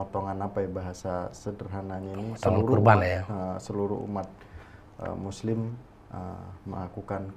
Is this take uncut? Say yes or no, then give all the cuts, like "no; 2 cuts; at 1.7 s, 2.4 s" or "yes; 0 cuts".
yes; 0 cuts